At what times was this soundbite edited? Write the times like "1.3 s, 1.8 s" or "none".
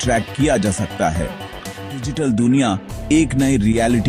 2.1 s